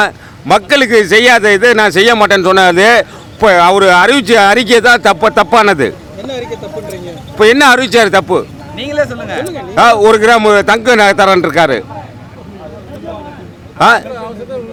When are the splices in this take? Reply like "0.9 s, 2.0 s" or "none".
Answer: none